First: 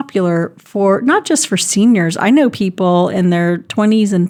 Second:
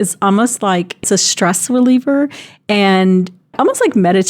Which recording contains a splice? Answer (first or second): second